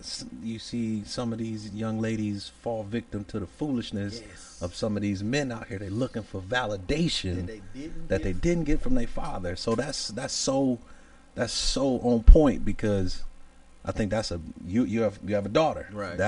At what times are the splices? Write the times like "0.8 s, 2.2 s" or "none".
none